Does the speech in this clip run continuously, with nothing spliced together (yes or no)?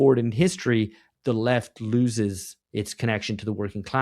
no